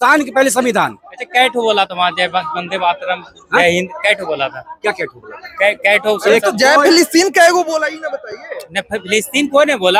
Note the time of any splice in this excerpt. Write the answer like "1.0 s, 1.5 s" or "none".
none